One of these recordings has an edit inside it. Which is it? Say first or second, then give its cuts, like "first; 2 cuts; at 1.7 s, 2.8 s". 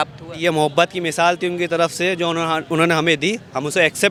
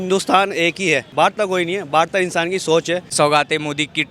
second; 2 cuts; at 1.1 s, 3.1 s